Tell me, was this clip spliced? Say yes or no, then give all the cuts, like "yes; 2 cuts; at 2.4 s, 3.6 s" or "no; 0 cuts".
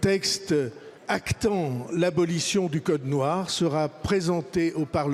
no; 0 cuts